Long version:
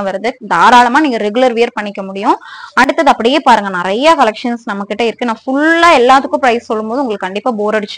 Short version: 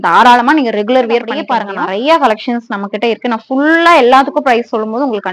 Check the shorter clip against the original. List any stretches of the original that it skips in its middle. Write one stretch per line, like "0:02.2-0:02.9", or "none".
0:01.8-0:03.3